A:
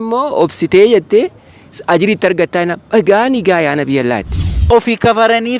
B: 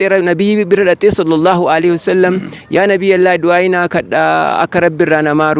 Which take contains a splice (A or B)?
A